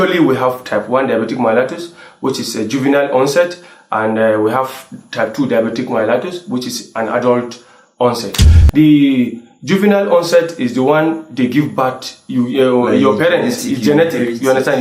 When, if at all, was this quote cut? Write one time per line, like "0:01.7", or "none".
0:08.4